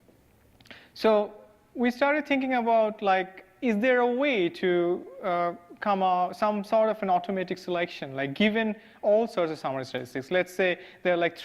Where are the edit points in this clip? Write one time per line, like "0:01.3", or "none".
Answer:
0:06.1